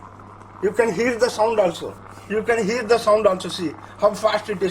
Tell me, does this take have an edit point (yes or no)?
yes